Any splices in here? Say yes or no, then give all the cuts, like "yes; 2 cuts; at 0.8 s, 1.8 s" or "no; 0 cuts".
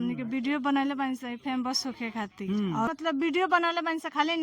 yes; 1 cut; at 2.9 s